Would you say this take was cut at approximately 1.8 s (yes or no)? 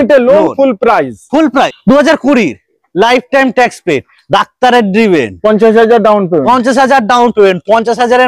yes